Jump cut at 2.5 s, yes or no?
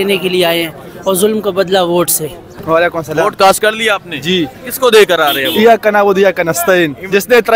yes